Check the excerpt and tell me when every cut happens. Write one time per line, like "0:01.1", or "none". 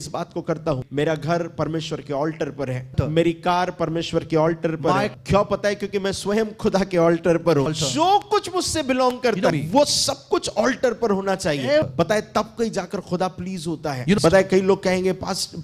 0:00.9
0:02.9
0:05.1
0:07.7
0:09.5
0:11.9
0:14.2